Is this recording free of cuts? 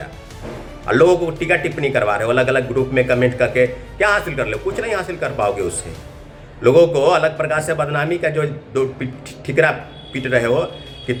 yes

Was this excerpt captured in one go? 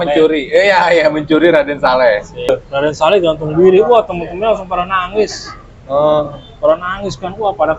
no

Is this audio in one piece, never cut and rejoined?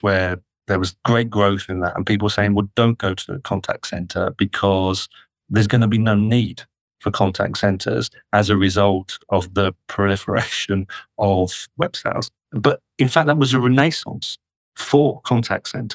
yes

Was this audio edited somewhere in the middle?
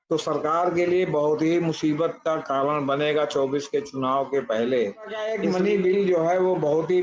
yes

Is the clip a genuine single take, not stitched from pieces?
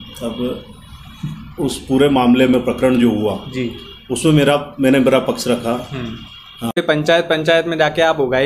no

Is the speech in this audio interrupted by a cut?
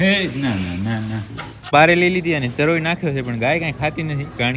yes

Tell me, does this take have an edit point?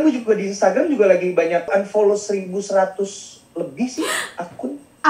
yes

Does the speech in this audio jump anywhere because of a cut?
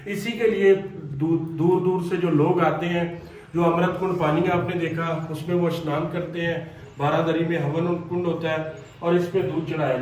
no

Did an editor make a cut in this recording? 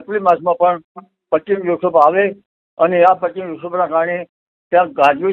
no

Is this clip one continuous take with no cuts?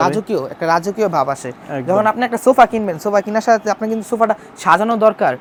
yes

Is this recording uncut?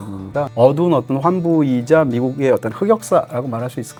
yes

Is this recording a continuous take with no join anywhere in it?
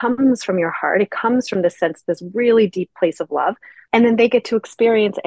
no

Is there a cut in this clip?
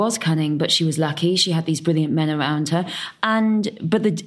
no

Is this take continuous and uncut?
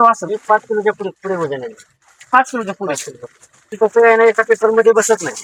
yes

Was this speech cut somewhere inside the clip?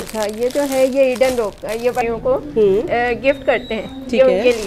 yes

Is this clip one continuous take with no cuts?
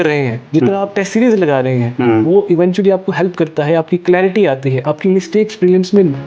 yes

